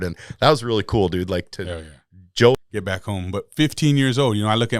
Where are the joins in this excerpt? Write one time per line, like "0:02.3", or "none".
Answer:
0:02.5